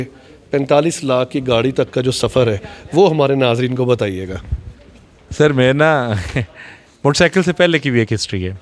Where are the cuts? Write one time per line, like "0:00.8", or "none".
none